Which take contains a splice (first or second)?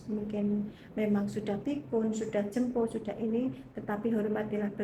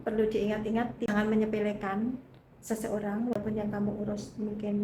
second